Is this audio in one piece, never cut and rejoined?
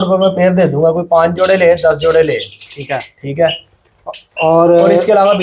yes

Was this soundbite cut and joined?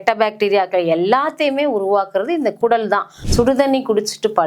yes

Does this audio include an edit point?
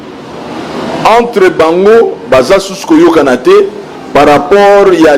no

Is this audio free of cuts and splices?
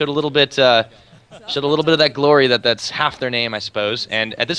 yes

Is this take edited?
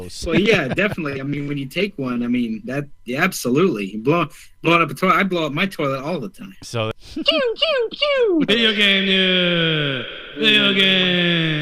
yes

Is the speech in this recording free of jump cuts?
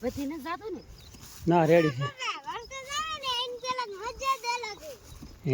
yes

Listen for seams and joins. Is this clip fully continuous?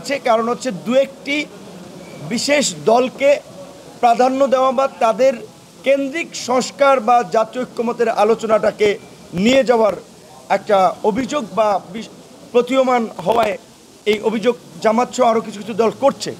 yes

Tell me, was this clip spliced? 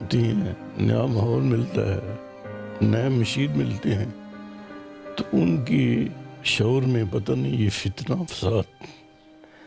no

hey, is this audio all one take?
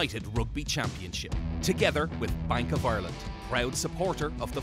yes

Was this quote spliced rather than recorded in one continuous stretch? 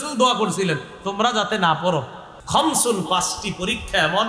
yes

